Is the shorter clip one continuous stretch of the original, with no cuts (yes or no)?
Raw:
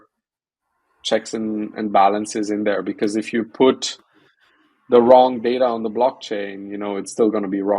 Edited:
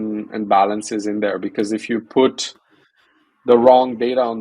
yes